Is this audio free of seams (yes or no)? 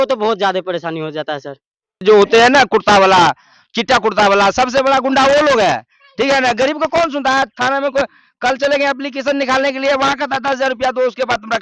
no